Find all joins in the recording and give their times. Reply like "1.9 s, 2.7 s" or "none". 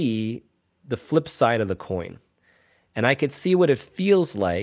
none